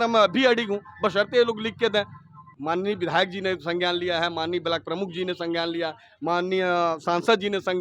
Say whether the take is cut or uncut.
cut